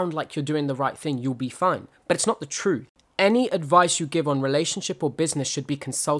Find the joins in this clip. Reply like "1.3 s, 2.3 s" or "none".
3.0 s